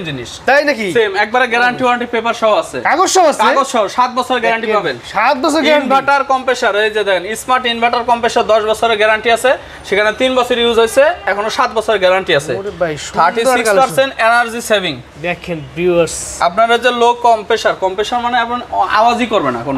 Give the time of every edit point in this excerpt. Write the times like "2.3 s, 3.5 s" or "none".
none